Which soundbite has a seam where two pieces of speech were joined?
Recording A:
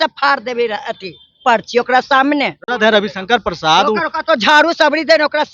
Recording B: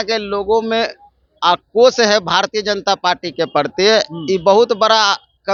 A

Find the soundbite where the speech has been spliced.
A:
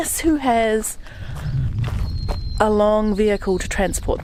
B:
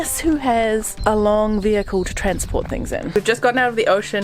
B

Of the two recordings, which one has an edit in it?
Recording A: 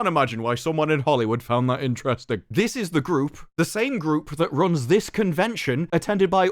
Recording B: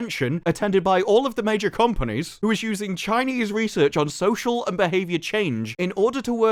A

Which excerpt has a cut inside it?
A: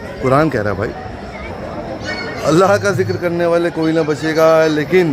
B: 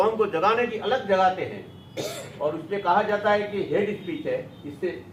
A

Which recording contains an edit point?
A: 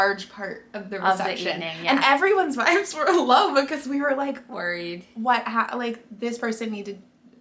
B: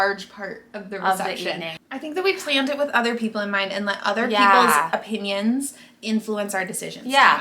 B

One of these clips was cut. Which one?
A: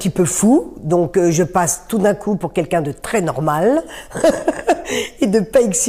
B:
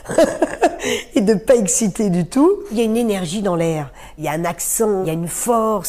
B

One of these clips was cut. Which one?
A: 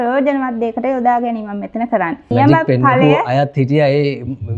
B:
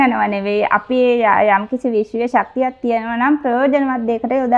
A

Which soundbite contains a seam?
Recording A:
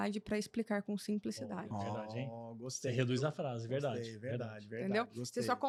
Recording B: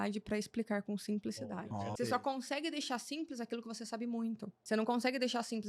B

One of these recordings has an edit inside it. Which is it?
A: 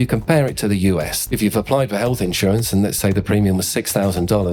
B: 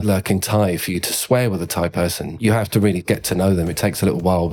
A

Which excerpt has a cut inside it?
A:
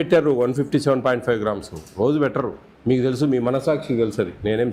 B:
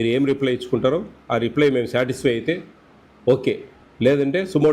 A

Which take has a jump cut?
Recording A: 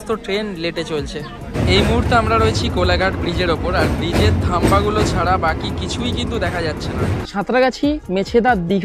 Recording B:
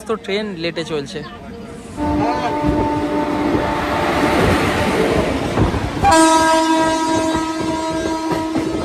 A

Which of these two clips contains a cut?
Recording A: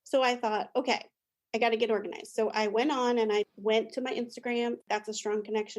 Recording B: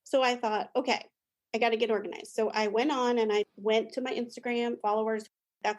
A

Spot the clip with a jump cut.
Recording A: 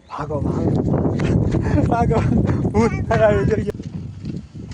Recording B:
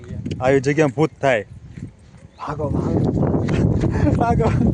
A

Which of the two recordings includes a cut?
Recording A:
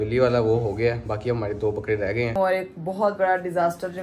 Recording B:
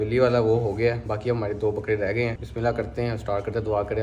A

